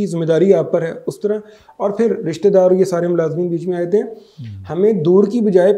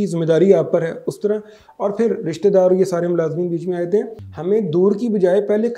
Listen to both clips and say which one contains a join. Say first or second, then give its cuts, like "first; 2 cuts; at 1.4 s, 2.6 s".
second; 1 cut; at 4.2 s